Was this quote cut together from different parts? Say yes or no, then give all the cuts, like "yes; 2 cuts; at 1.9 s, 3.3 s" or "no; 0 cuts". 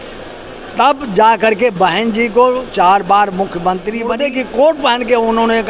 yes; 1 cut; at 4.2 s